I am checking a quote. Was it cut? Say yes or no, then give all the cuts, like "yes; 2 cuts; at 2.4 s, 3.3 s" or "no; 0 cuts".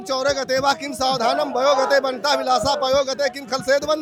no; 0 cuts